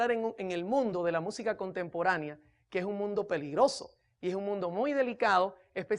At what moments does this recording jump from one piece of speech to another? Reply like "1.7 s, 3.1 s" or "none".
1.2 s